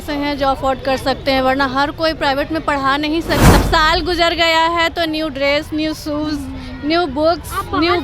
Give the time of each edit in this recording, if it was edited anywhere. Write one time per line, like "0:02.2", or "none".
0:03.6